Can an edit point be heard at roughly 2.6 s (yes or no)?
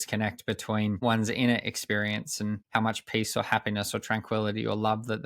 yes